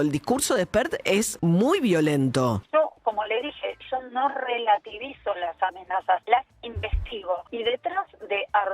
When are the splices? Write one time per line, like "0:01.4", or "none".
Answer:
0:01.2
0:02.6
0:06.2
0:07.5